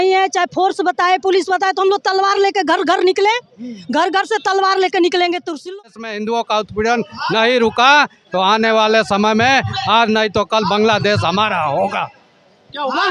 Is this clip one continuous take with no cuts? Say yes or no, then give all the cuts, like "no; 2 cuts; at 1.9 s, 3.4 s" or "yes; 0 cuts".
no; 1 cut; at 5.7 s